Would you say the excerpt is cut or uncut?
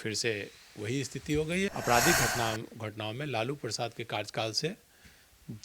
cut